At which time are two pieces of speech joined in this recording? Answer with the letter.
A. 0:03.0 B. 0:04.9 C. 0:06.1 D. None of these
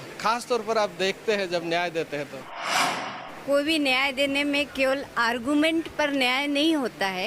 A